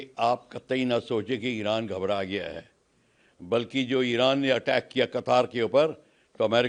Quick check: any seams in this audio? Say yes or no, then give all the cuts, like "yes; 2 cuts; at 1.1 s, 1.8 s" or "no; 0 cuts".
no; 0 cuts